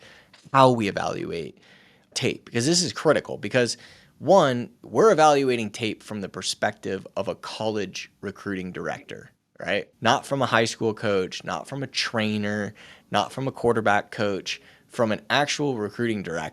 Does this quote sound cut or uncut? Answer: cut